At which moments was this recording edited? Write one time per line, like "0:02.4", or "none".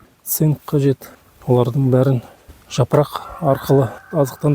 none